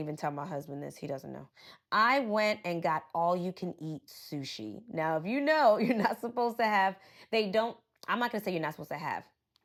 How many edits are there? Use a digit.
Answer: 0